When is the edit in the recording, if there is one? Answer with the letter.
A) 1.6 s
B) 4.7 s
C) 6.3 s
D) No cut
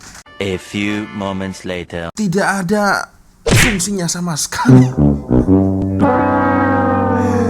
B